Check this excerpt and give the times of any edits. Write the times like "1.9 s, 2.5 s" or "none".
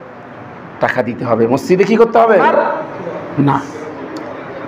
2.5 s